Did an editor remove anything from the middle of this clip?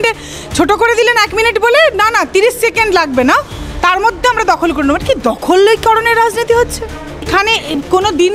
yes; 1 cut; at 7.3 s

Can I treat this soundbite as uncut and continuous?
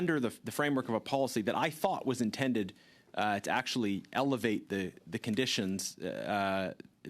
yes; 0 cuts

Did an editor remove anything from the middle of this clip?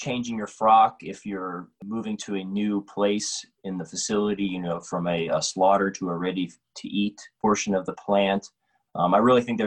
yes; 2 cuts; at 1.8 s, 7.4 s

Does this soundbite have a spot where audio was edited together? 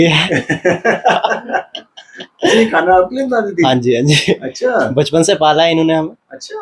no; 0 cuts

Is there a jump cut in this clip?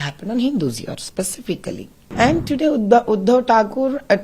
yes; 1 cut; at 2.0 s

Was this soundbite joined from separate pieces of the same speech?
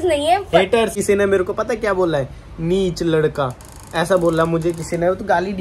yes; 1 cut; at 0.9 s

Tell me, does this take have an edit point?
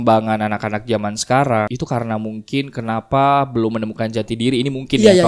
no; 0 cuts

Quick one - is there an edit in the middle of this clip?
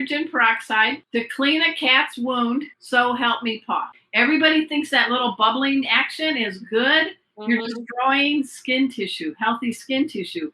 yes; 3 cuts; at 1.0 s, 2.8 s, 4.0 s

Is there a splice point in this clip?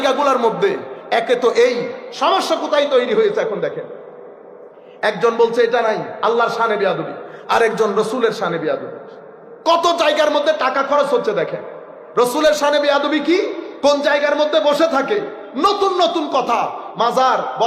no; 0 cuts

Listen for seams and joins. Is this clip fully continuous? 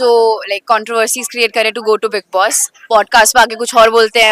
yes; 0 cuts

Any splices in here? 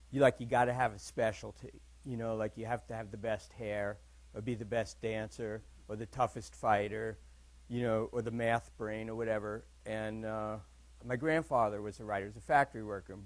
no; 0 cuts

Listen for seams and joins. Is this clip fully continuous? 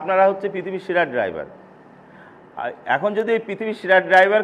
yes; 0 cuts

